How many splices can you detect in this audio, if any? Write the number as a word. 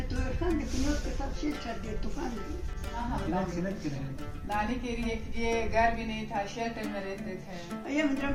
zero